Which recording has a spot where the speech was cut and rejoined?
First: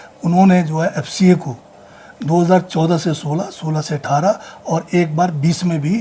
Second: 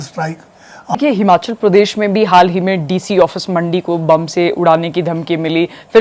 second; 1 cut; at 1.0 s

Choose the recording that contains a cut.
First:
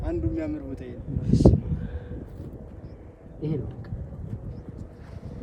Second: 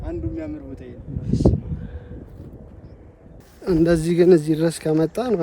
second; 1 cut; at 3.4 s

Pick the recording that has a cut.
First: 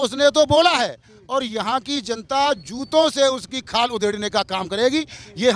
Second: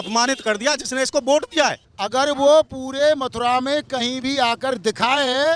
second; 1 cut; at 1.9 s

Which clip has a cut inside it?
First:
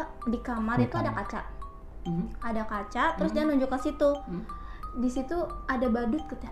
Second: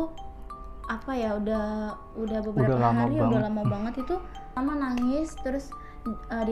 second; 1 cut; at 4.4 s

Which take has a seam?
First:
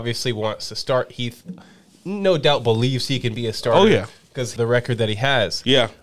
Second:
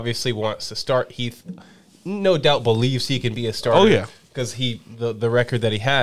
first; 1 cut; at 4.5 s

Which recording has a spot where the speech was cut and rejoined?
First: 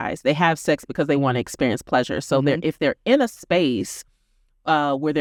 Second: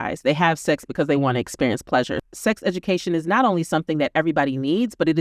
second; 1 cut; at 2.2 s

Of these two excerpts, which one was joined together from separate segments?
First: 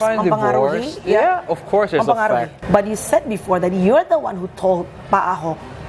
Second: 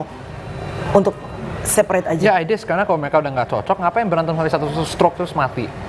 first; 1 cut; at 2.5 s

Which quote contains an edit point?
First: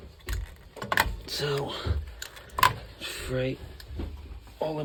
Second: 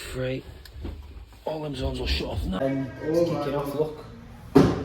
second; 1 cut; at 2.6 s

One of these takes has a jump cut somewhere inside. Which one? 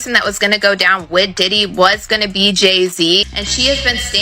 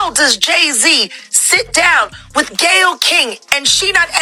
first; 1 cut; at 3.3 s

